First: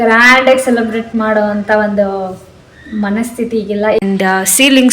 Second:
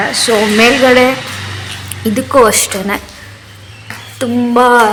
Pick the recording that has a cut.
first; 1 cut; at 4.0 s

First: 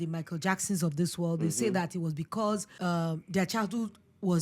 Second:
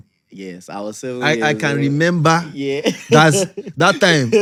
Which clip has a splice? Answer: first; 1 cut; at 2.7 s

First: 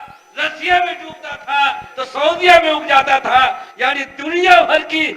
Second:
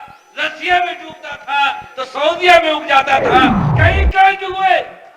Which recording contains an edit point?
second; 1 cut; at 3.7 s

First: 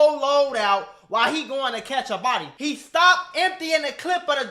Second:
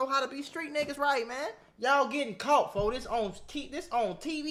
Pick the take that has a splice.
first; 1 cut; at 2.5 s

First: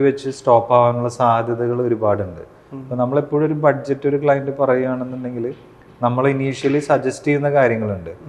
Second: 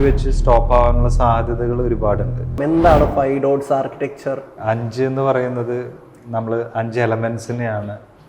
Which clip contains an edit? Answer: second; 2 cuts; at 2.5 s, 4.5 s

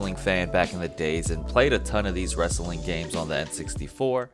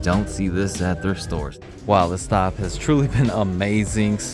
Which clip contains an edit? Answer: second; 1 cut; at 1.5 s

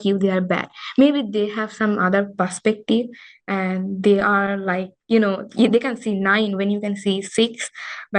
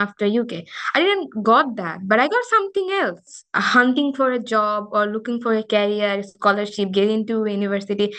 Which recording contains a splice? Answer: second; 1 cut; at 3.3 s

